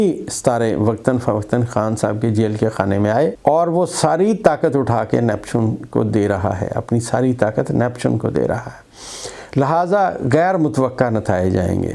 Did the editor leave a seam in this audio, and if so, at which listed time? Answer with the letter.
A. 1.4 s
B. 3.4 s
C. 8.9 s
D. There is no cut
B